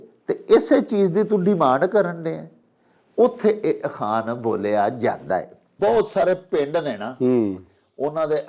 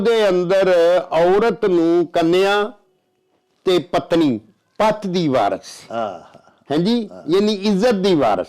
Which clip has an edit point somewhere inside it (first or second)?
first